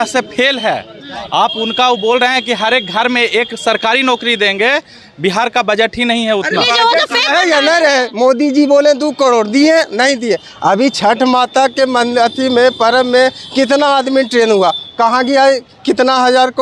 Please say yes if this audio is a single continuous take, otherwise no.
yes